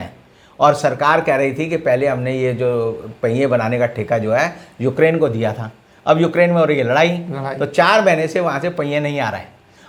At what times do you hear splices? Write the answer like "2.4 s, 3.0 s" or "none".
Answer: none